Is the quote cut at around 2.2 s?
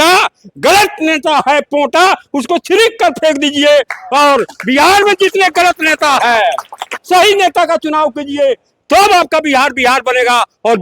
no; 1 cut; at 7.0 s

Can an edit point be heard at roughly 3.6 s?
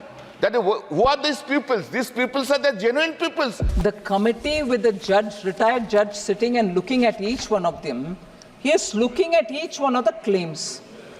yes; 1 cut; at 3.6 s

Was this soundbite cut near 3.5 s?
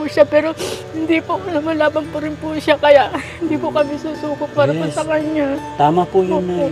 no; 0 cuts

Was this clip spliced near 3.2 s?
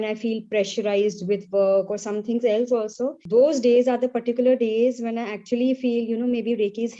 yes; 1 cut; at 3.2 s

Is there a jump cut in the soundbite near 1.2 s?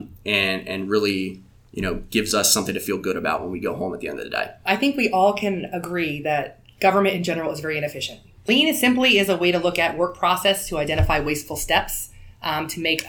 no; 2 cuts; at 4.6 s, 8.4 s

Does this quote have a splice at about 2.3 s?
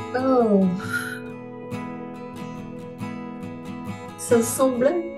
no; 2 cuts; at 1.1 s, 4.2 s

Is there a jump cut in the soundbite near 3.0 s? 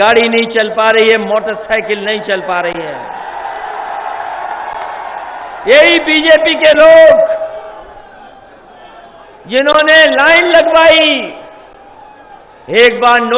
no; 0 cuts

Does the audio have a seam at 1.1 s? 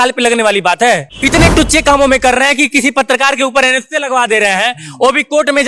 yes; 1 cut; at 1.1 s

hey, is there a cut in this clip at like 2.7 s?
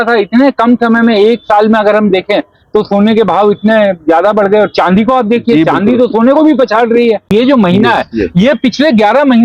no; 1 cut; at 7.3 s

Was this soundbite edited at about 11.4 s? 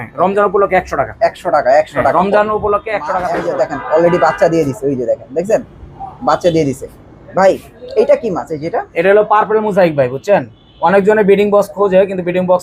no; 1 cut; at 3.4 s

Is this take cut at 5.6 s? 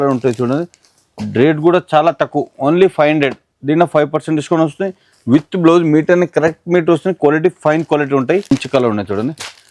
no; 1 cut; at 8.5 s

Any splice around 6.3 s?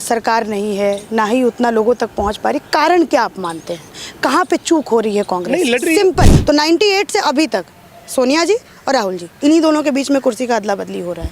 yes; 1 cut; at 6.3 s

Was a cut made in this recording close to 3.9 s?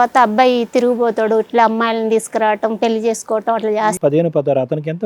yes; 1 cut; at 3.9 s

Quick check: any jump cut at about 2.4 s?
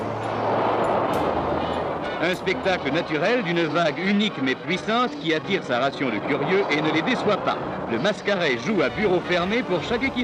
yes; 1 cut; at 2.4 s

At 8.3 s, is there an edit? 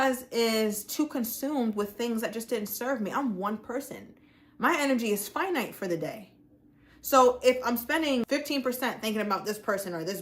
yes; 1 cut; at 8.3 s

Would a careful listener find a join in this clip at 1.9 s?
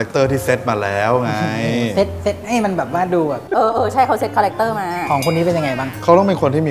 no; 0 cuts

